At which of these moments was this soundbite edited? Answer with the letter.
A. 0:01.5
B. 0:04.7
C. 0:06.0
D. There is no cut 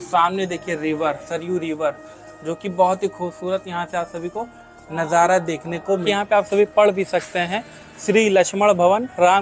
C